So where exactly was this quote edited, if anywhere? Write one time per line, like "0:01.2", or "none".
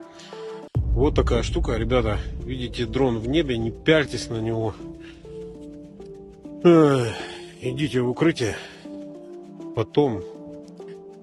0:10.3